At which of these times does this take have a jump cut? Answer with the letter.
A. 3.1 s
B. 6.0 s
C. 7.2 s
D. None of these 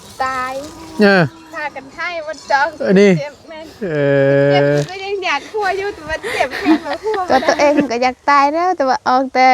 C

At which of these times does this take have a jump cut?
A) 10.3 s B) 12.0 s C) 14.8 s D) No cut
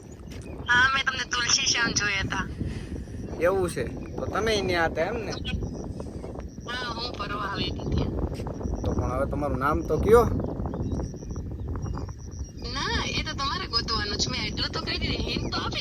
D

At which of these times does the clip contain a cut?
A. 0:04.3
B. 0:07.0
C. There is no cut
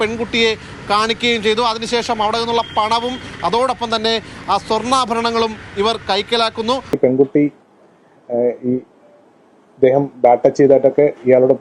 B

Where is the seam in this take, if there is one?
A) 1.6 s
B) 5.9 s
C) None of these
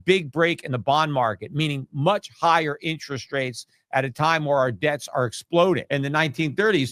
B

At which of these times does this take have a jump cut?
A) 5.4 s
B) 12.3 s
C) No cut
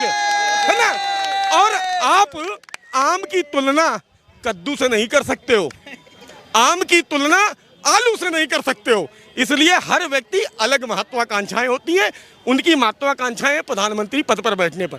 C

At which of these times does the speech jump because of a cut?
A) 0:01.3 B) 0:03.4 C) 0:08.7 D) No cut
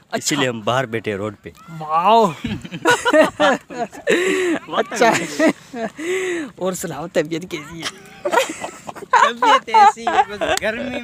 D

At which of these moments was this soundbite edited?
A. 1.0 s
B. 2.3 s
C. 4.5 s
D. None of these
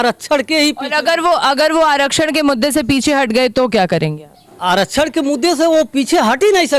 D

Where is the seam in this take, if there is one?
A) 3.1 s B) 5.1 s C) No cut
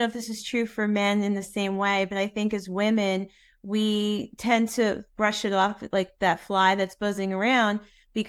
B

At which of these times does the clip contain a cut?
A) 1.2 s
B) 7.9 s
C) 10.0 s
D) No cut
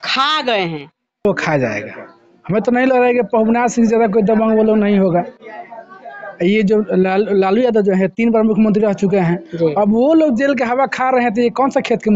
A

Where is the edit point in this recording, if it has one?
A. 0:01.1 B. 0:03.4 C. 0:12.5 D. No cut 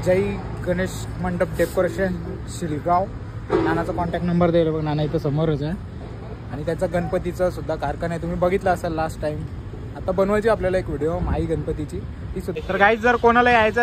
C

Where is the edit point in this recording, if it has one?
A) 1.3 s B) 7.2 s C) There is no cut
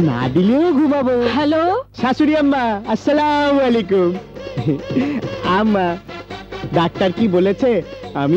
A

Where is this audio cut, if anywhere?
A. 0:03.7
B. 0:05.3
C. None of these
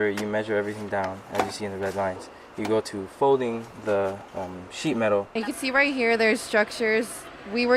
B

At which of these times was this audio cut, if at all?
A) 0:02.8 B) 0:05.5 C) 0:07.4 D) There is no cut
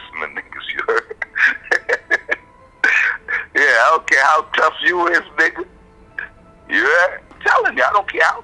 C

